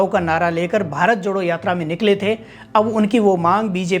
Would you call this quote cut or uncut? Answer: uncut